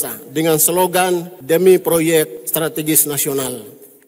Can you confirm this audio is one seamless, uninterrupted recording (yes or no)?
no